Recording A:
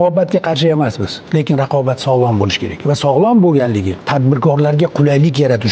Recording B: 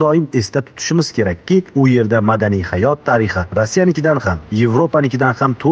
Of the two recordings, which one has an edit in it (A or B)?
A